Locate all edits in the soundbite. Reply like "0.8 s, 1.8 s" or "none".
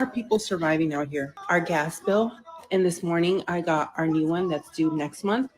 1.4 s

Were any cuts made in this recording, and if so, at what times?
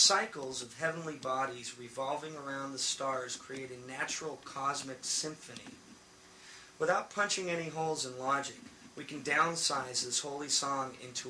none

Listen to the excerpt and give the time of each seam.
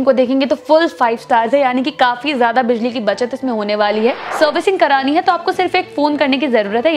4.2 s

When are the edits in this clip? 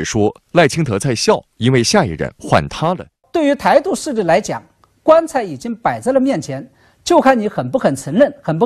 3.2 s

